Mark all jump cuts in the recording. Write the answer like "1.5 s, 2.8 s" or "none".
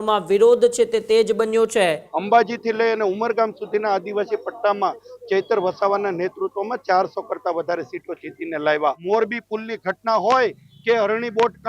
2.1 s, 9.0 s